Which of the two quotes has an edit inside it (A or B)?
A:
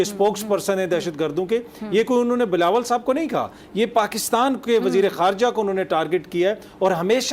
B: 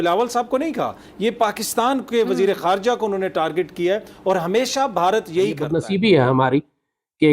B